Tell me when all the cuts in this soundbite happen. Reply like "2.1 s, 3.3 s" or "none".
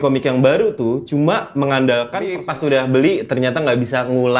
2.4 s